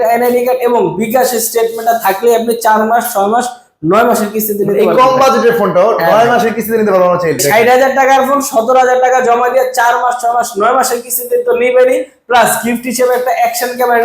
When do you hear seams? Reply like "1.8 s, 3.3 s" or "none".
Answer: 7.4 s